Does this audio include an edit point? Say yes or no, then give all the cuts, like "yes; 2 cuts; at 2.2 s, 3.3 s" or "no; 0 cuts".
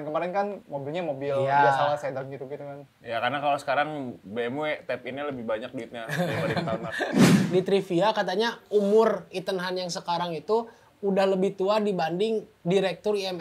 yes; 1 cut; at 7.4 s